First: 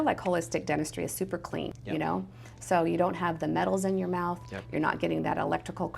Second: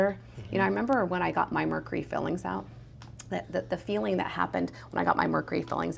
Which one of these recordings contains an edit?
first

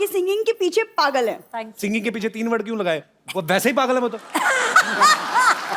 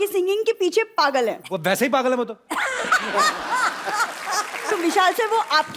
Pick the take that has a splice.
second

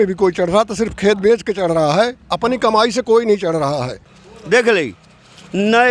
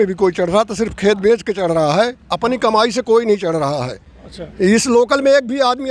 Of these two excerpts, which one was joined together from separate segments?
first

